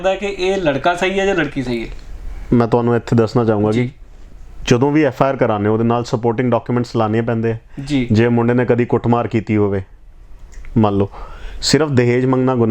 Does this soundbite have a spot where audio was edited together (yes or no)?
no